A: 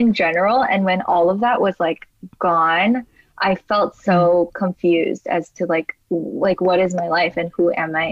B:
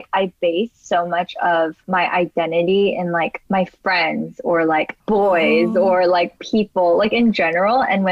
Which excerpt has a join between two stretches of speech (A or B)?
B